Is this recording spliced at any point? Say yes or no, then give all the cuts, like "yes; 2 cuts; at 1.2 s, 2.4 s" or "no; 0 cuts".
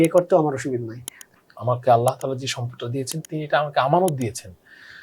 yes; 1 cut; at 1.3 s